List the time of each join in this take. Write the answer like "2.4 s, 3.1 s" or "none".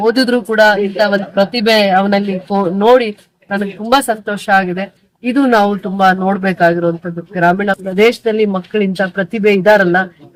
none